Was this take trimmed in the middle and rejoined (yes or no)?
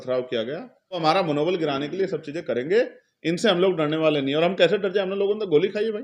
yes